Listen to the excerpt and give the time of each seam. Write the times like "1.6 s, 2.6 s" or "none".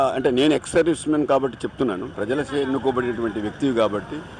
2.1 s